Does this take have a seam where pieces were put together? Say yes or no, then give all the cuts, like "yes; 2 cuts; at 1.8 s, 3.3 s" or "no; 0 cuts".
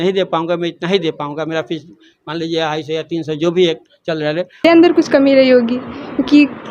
yes; 1 cut; at 4.6 s